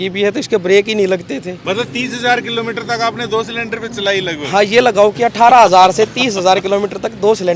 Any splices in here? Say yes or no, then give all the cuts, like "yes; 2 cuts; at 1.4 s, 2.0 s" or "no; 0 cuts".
yes; 1 cut; at 1.5 s